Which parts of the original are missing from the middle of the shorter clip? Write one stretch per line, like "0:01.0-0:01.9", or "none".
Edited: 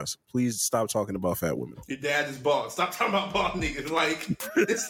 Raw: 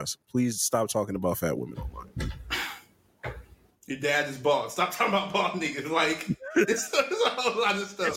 0:01.8-0:03.8